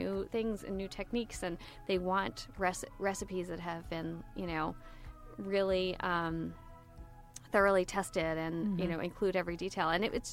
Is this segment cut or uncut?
uncut